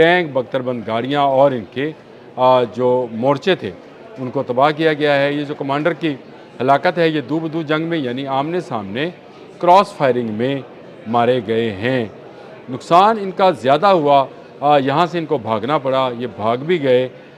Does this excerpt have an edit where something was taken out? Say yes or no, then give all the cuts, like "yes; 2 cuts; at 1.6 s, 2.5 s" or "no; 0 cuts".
no; 0 cuts